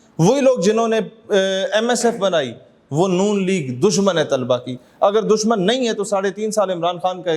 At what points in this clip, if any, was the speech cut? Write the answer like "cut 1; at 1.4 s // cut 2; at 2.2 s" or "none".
none